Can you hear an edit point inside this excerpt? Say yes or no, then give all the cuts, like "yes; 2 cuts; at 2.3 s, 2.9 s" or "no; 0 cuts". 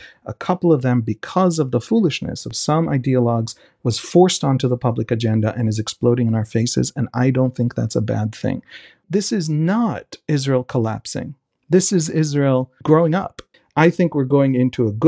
yes; 4 cuts; at 2.2 s, 9.0 s, 12.7 s, 13.4 s